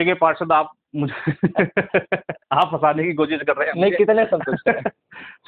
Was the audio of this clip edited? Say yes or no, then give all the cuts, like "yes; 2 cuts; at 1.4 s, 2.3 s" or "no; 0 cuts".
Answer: no; 0 cuts